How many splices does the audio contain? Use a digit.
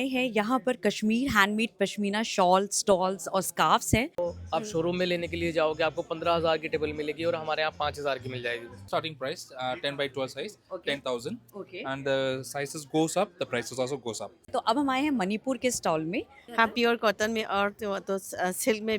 4